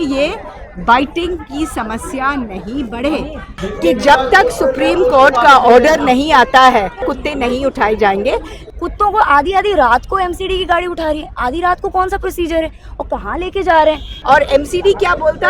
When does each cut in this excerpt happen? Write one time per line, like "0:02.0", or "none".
0:03.5
0:07.2
0:08.6
0:14.1